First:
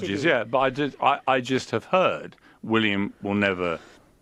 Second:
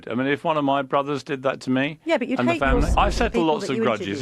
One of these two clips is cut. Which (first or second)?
second